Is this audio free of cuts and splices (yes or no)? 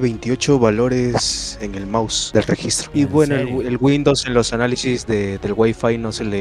yes